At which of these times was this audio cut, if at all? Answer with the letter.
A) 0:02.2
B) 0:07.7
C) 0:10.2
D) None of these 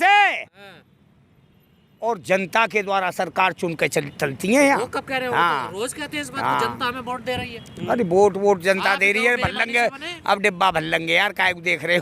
D